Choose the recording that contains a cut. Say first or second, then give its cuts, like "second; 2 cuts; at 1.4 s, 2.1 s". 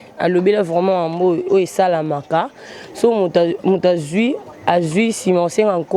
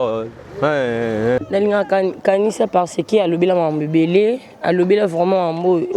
second; 1 cut; at 1.4 s